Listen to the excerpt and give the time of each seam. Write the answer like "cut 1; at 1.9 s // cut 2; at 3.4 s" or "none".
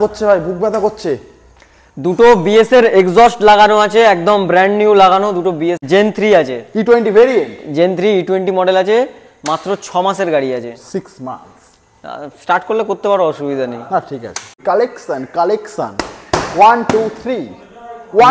cut 1; at 5.8 s // cut 2; at 14.5 s